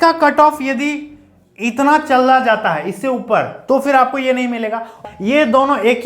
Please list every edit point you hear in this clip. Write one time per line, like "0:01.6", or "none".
0:05.0